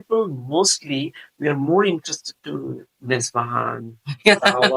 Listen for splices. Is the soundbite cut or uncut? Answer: uncut